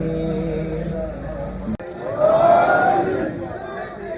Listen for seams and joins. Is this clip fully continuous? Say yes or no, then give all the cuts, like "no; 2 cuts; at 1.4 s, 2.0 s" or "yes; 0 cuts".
no; 1 cut; at 1.8 s